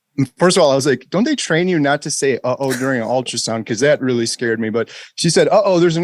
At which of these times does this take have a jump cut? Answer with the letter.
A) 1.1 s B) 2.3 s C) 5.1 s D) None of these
D